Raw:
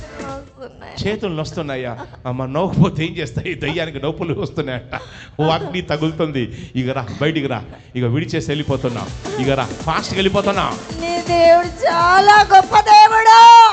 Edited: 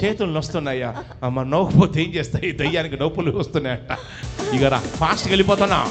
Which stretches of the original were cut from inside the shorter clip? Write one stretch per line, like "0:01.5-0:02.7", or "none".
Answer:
0:05.2-0:09.1